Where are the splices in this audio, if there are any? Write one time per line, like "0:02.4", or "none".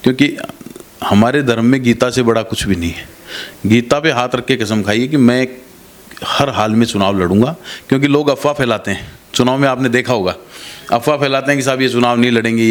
none